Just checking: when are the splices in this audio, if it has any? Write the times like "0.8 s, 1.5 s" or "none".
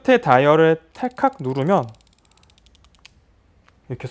none